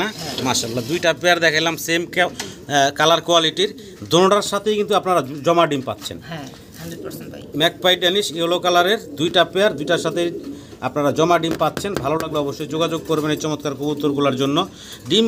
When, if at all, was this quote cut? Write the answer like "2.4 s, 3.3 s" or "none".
none